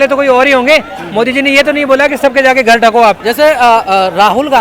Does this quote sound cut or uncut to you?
uncut